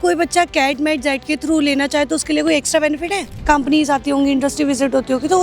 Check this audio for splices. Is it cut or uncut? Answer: cut